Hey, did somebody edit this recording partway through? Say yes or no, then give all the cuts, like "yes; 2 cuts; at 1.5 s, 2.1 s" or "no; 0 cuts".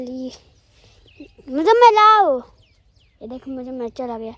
no; 0 cuts